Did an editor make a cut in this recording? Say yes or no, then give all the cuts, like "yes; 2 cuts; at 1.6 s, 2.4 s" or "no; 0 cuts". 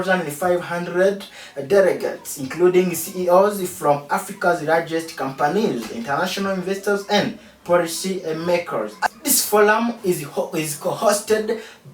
yes; 1 cut; at 9.1 s